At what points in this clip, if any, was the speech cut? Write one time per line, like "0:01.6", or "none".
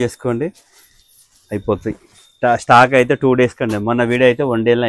none